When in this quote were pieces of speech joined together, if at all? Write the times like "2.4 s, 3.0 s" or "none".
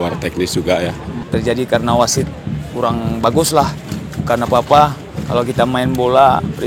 1.2 s